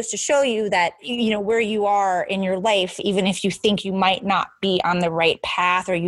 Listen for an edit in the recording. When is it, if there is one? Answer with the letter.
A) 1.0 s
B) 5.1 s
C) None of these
A